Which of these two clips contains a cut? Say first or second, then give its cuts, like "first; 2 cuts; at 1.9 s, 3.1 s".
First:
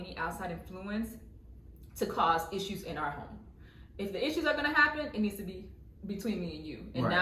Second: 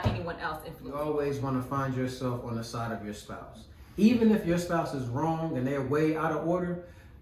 second; 1 cut; at 0.9 s